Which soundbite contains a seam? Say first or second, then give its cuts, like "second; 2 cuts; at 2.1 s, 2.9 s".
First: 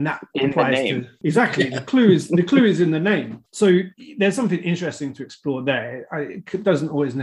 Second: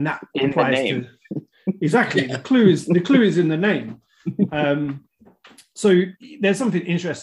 first; 2 cuts; at 1.2 s, 3.4 s